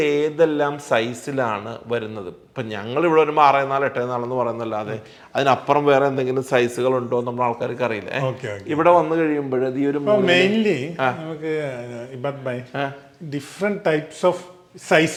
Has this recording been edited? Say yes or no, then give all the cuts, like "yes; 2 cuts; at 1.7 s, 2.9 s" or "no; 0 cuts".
no; 0 cuts